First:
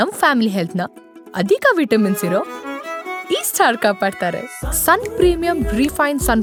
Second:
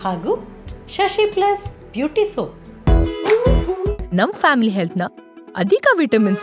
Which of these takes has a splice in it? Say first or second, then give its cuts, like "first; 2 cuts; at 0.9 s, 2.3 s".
second; 1 cut; at 2.6 s